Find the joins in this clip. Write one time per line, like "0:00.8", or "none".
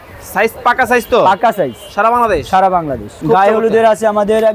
0:03.2